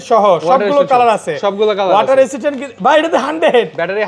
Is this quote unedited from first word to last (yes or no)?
yes